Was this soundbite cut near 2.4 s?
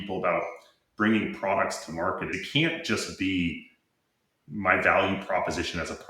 yes; 1 cut; at 2.4 s

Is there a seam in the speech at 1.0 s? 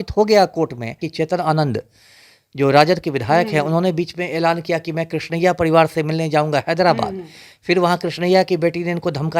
yes; 1 cut; at 1.0 s

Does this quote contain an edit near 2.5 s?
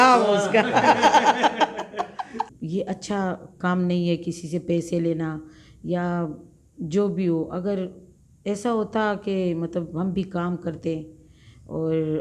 yes; 1 cut; at 2.5 s

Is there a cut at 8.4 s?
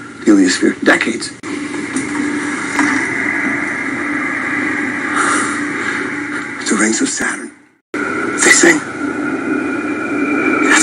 yes; 1 cut; at 8.4 s

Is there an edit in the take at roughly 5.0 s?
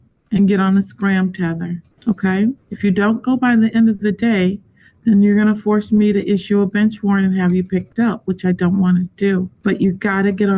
no; 3 cuts; at 1.9 s, 2.7 s, 9.5 s

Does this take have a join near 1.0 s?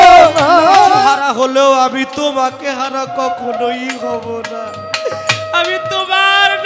yes; 1 cut; at 1.0 s

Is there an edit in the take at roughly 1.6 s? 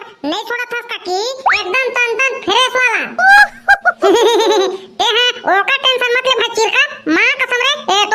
yes; 1 cut; at 1.6 s

